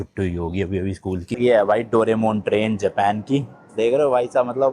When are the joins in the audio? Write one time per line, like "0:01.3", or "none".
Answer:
0:01.3